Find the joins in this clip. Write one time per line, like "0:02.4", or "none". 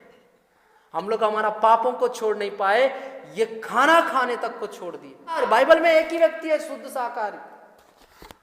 0:05.4